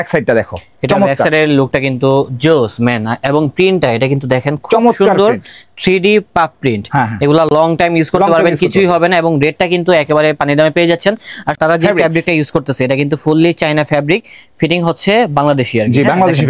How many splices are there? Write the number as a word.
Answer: zero